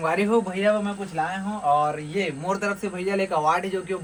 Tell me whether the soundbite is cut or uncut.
uncut